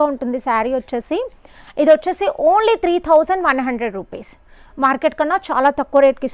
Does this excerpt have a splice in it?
no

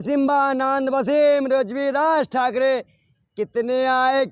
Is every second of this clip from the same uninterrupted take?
yes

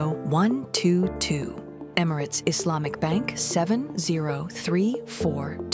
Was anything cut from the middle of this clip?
yes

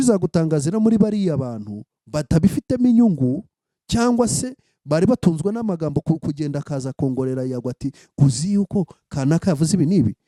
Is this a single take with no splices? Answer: yes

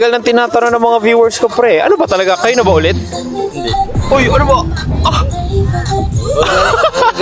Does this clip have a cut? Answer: no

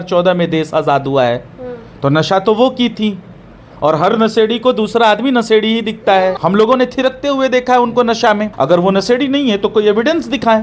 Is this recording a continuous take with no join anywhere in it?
no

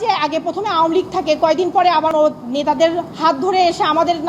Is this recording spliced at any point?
yes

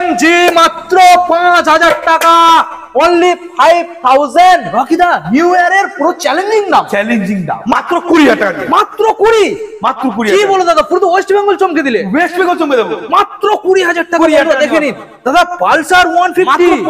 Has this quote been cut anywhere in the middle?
yes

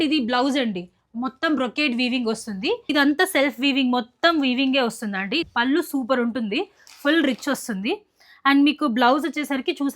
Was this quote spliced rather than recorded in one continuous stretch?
yes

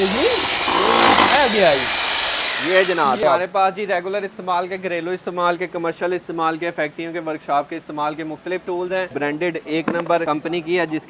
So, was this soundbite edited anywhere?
yes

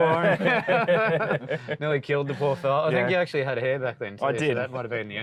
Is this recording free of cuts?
yes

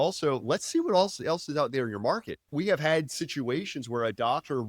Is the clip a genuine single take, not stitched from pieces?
no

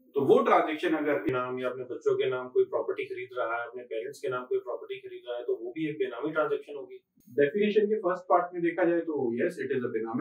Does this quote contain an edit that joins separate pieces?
yes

